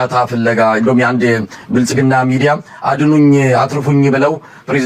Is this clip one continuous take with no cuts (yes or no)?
yes